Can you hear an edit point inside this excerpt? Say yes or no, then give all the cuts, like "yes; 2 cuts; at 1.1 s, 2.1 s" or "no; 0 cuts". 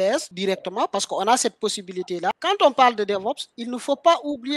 yes; 1 cut; at 2.3 s